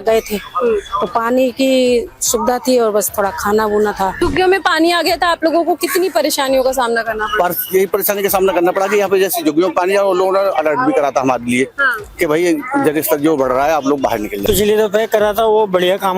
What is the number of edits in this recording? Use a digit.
2